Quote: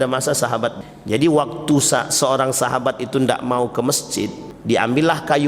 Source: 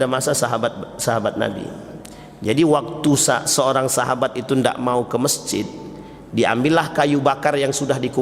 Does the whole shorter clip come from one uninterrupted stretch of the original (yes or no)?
no